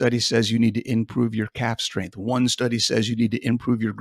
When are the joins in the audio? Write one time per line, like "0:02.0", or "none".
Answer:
none